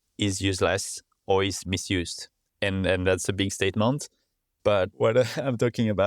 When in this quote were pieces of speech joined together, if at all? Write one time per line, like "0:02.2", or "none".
0:04.9